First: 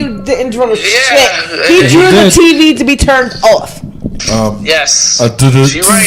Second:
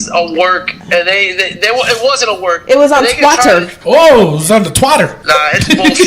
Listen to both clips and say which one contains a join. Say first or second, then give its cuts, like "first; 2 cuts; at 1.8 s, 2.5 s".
second; 2 cuts; at 3.7 s, 5.2 s